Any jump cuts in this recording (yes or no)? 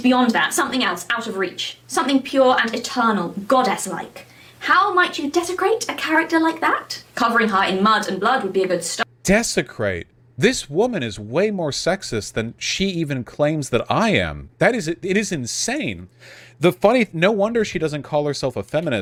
no